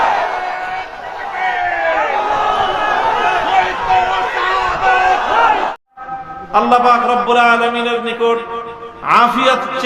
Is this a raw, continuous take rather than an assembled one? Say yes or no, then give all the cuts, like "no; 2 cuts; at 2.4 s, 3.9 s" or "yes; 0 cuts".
no; 1 cut; at 5.7 s